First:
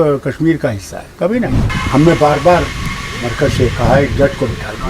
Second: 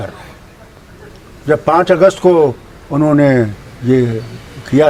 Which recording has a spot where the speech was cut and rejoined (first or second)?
first